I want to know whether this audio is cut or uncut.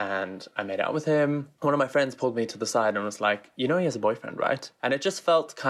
uncut